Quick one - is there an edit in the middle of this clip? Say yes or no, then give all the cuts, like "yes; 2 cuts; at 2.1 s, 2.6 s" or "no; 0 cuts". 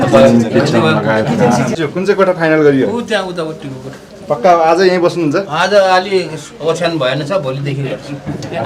yes; 1 cut; at 1.7 s